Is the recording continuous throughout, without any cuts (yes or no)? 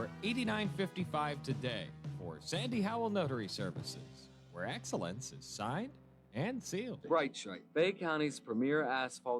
no